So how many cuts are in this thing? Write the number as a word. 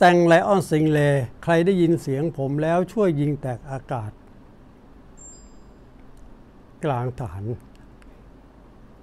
one